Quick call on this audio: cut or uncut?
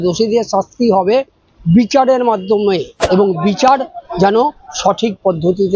cut